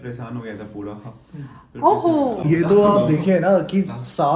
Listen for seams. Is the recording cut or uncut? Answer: cut